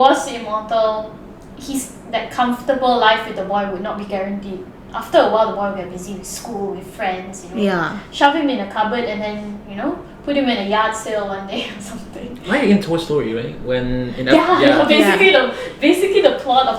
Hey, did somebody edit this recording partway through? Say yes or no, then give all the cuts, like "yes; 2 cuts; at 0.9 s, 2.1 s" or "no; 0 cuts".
no; 0 cuts